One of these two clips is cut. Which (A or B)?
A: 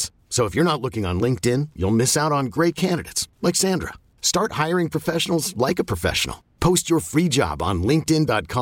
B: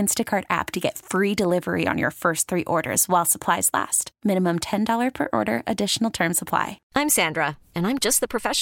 B